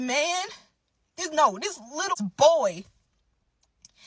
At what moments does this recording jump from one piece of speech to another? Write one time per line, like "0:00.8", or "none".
0:02.1